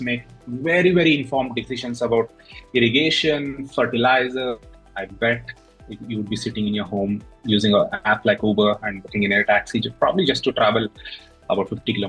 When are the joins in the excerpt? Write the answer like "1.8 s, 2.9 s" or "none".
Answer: 4.6 s